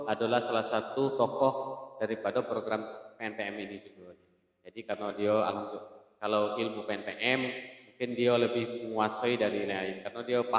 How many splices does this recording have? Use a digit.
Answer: 0